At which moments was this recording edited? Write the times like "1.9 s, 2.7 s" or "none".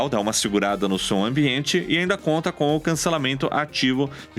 none